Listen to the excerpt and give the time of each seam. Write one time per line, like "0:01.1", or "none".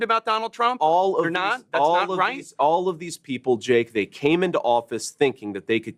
none